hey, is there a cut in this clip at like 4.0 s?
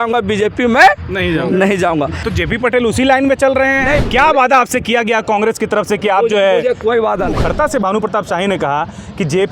yes; 3 cuts; at 2.2 s, 4.0 s, 7.3 s

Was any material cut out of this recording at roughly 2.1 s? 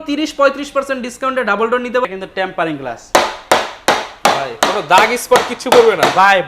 yes; 1 cut; at 2.1 s

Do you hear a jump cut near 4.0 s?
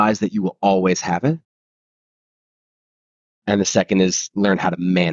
no; 0 cuts

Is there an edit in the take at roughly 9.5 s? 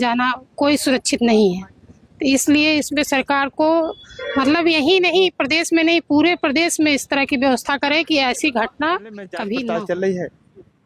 yes; 1 cut; at 9.5 s

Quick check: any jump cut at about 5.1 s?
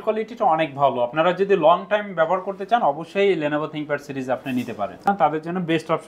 yes; 1 cut; at 5.1 s

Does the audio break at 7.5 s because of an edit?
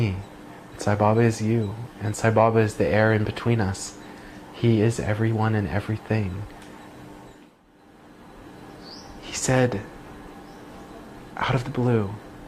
yes; 1 cut; at 7.5 s

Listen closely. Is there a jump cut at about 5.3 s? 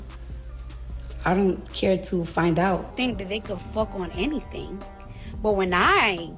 no; 1 cut; at 2.9 s

